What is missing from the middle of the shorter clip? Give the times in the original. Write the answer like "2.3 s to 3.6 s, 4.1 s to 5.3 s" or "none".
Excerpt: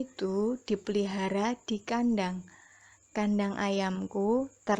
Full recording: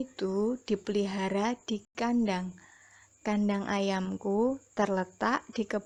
1.8 s to 1.9 s

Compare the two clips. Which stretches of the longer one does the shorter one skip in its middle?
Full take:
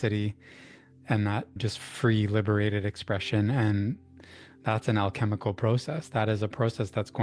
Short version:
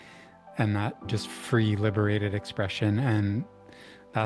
none

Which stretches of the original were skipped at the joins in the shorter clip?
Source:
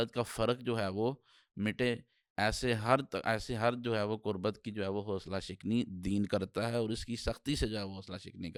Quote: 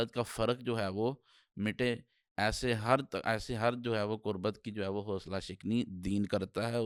none

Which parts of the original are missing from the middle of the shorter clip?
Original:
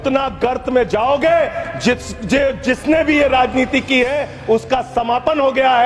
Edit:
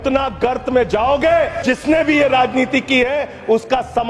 1.6 s to 2.6 s

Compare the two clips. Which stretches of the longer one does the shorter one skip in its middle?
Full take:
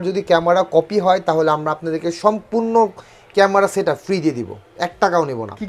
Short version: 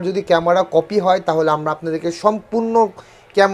none

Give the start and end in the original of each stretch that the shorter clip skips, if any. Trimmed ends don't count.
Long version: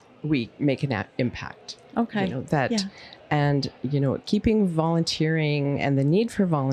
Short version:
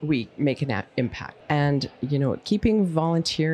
1.5 s to 3.1 s

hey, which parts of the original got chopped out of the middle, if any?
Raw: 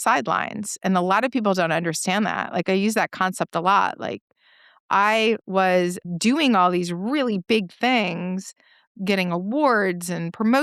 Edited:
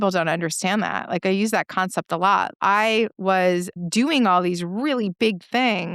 3.9 s to 4.8 s

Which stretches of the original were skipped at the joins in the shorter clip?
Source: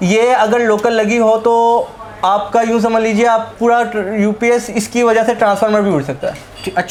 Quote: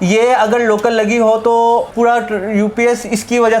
1.9 s to 3.5 s

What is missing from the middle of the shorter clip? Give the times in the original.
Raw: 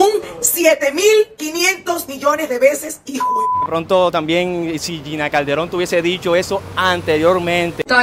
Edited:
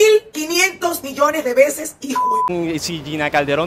3.5 s to 4.5 s

